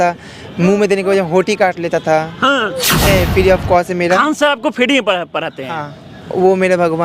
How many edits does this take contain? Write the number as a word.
two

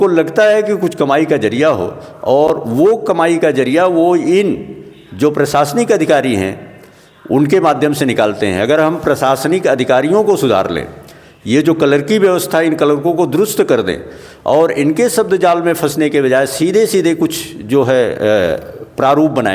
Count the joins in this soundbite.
zero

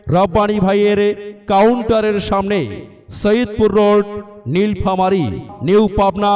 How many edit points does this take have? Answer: one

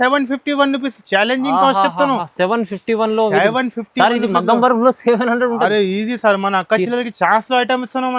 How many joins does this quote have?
zero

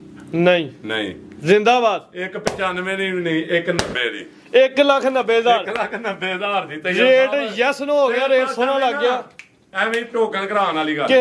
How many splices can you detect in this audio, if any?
zero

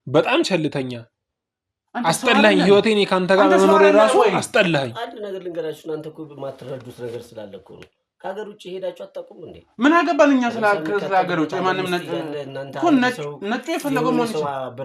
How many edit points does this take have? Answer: zero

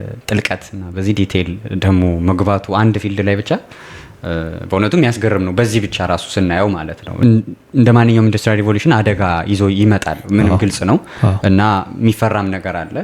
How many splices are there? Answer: one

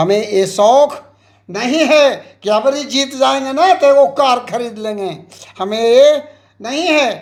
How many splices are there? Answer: zero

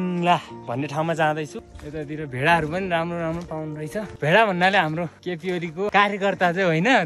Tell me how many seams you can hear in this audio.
three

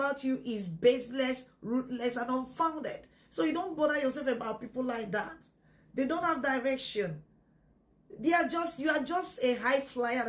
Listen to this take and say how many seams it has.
zero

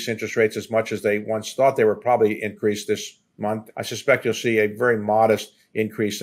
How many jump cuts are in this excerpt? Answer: one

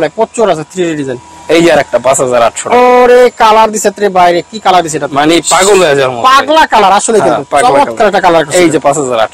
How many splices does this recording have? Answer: zero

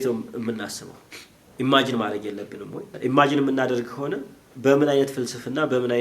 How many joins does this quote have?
one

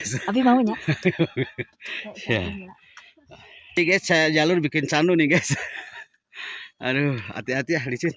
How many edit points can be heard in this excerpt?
one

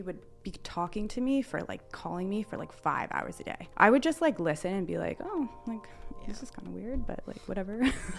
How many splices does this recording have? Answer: one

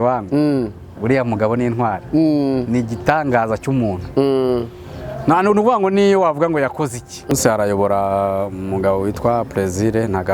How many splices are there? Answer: one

